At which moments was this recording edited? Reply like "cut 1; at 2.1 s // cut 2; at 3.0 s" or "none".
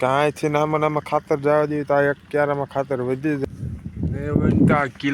cut 1; at 3.4 s